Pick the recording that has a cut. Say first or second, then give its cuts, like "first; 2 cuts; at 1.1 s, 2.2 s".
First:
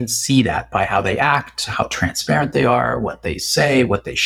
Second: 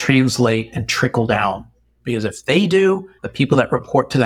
second; 1 cut; at 3.2 s